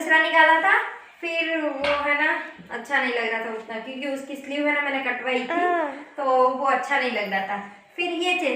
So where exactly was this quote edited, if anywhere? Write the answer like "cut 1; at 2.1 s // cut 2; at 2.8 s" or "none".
none